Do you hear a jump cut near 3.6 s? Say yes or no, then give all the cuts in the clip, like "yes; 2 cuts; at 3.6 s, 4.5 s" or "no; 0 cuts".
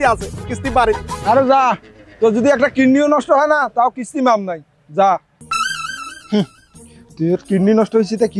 no; 2 cuts; at 1.1 s, 5.4 s